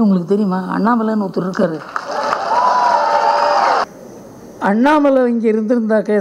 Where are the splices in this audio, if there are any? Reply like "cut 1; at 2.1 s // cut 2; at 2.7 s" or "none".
cut 1; at 3.8 s